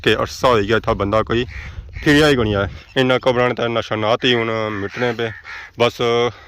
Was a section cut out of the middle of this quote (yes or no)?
yes